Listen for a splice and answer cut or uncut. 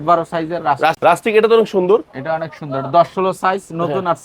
cut